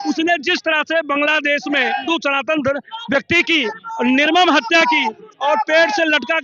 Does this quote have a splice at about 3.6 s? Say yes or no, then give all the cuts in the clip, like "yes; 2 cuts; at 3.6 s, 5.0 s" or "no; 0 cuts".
no; 1 cut; at 2.1 s